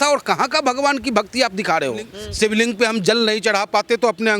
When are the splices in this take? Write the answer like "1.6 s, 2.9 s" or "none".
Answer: 2.2 s